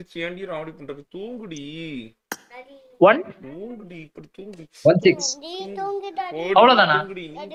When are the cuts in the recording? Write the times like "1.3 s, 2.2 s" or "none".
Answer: none